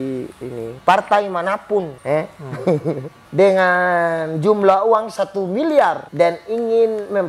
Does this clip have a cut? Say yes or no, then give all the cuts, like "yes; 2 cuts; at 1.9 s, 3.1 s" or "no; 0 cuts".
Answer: yes; 3 cuts; at 1.9 s, 3.2 s, 6.1 s